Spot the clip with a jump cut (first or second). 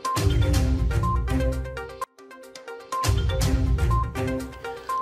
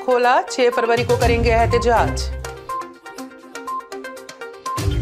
first